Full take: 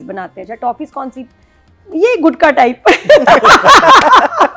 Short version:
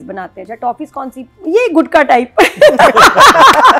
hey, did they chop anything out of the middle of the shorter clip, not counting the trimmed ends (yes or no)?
yes